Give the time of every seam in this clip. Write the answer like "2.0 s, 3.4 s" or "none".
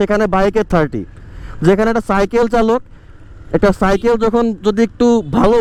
none

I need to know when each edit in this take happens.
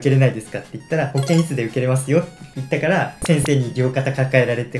none

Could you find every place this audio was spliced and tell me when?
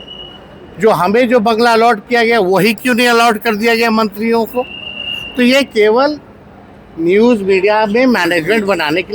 none

